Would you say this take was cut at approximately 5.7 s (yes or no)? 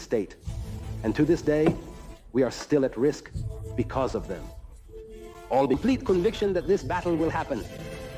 yes